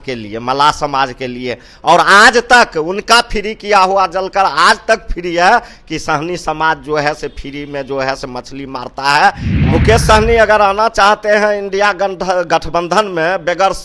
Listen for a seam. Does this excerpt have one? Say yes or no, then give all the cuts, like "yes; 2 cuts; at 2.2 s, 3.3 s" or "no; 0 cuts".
yes; 1 cut; at 9.5 s